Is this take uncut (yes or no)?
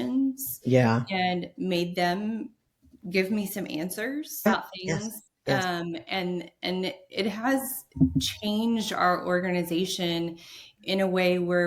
no